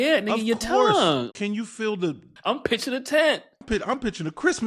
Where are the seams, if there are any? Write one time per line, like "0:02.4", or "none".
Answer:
0:01.3
0:02.3
0:03.6